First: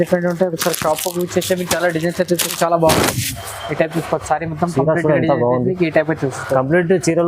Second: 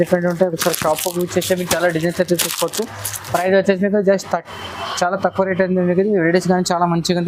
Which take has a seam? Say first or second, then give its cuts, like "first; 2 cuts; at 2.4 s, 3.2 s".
first; 1 cut; at 2.5 s